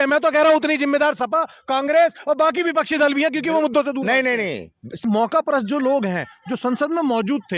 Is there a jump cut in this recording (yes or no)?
yes